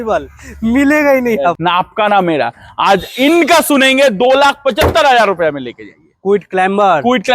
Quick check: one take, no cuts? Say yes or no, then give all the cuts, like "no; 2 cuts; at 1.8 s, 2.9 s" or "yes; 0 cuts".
no; 1 cut; at 1.6 s